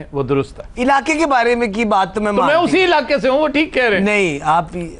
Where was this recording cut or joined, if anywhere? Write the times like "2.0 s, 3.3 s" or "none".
none